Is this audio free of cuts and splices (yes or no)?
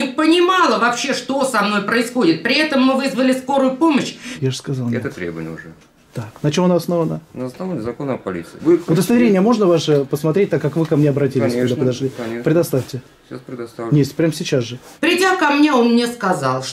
no